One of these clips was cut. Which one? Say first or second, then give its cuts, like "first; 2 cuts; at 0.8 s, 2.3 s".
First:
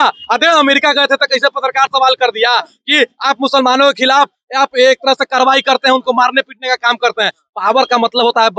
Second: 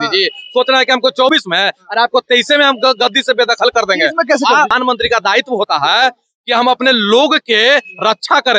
second; 1 cut; at 4.7 s